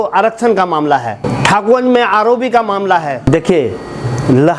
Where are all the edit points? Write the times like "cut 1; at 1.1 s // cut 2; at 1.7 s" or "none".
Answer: cut 1; at 1.3 s // cut 2; at 3.3 s